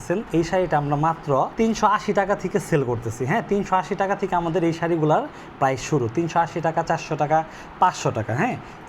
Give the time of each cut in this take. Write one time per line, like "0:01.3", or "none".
0:01.5